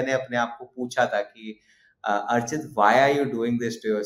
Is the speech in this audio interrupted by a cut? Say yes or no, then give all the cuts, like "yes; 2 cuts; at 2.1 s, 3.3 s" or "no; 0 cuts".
no; 0 cuts